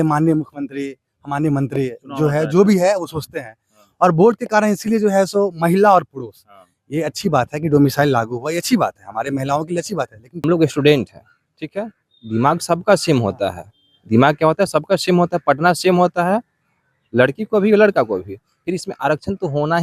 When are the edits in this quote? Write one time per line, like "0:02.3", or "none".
0:10.4